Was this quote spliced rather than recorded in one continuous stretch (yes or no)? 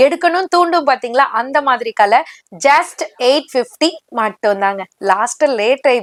no